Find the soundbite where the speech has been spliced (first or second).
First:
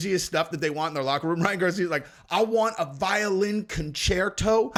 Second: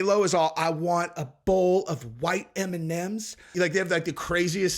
second